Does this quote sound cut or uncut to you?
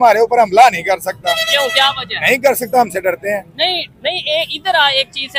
uncut